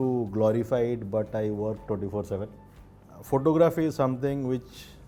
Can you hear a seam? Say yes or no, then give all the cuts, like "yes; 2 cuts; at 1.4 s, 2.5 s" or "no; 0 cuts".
no; 0 cuts